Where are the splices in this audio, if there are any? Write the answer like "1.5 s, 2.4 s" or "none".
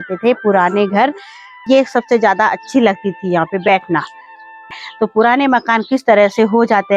1.6 s, 4.7 s